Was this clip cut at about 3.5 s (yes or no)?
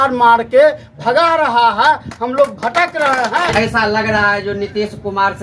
yes